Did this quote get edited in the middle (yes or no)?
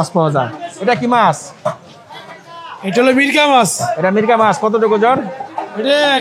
no